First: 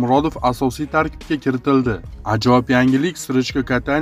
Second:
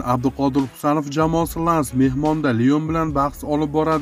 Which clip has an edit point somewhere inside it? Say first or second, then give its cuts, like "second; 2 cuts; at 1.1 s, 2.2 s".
first; 1 cut; at 2.1 s